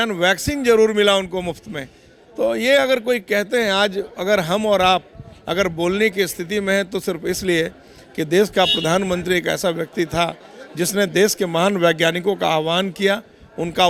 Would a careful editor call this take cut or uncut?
uncut